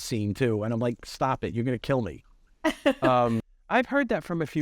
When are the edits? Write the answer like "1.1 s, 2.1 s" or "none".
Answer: 3.5 s